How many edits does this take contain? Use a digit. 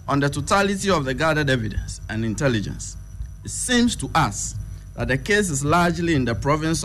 0